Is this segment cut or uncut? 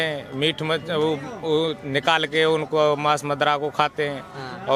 uncut